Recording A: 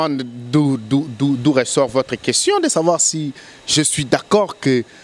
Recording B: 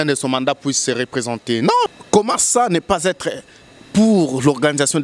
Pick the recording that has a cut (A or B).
B